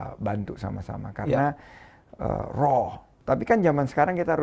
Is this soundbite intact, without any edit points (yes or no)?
no